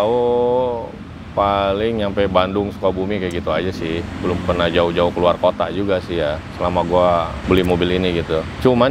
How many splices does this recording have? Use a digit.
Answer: 1